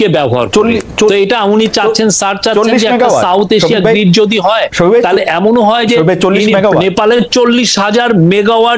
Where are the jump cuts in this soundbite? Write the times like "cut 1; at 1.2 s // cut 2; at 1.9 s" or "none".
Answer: none